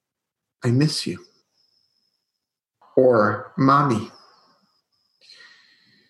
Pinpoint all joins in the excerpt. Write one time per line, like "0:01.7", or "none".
0:02.8